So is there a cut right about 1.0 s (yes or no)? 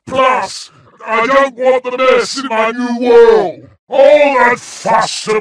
no